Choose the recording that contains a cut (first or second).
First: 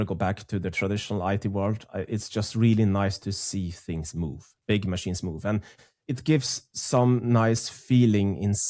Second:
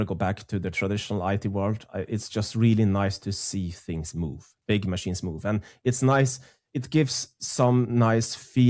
first